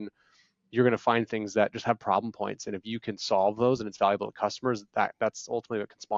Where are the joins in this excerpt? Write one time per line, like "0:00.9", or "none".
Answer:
none